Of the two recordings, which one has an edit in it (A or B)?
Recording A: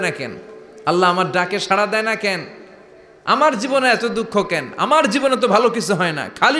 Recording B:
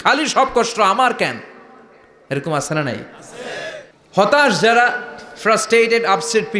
B